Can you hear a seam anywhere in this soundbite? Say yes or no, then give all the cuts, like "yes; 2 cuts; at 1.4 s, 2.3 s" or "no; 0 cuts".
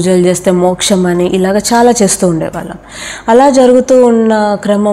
no; 0 cuts